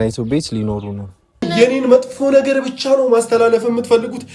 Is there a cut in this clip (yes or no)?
yes